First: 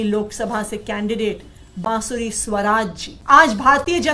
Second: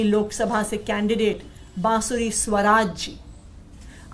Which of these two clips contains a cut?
first; 1 cut; at 3.1 s

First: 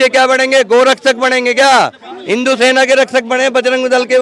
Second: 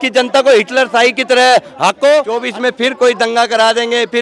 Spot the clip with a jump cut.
second; 1 cut; at 2.4 s

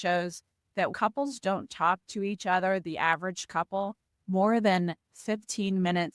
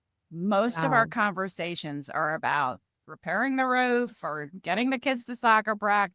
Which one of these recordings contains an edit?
first; 1 cut; at 0.9 s

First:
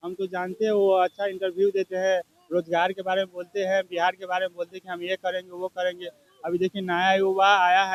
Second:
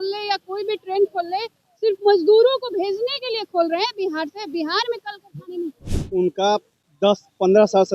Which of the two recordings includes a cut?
second; 1 cut; at 5.9 s

